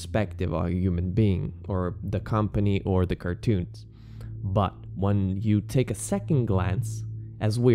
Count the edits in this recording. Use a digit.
0